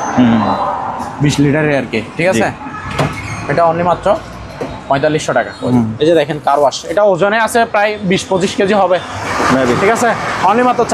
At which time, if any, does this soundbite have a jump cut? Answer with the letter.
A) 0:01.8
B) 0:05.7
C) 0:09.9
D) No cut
B